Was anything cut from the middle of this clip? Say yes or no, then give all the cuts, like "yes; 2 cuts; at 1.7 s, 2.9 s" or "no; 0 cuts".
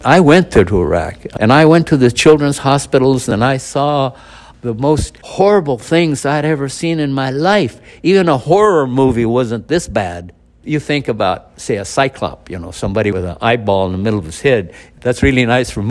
yes; 5 cuts; at 1.2 s, 3.3 s, 5.2 s, 10.6 s, 13.1 s